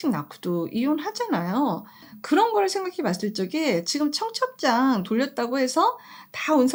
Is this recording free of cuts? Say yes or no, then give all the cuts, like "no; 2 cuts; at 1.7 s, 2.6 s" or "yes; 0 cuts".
yes; 0 cuts